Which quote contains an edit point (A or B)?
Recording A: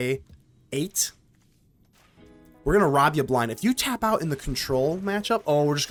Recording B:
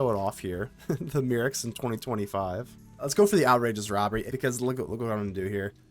B